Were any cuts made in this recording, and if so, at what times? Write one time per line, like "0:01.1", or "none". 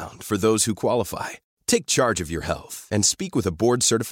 none